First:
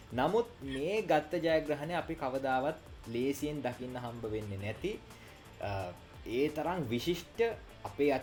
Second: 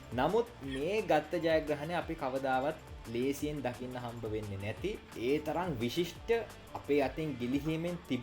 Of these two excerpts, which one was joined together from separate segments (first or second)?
second